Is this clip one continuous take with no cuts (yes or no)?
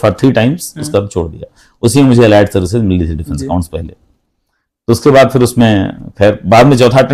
yes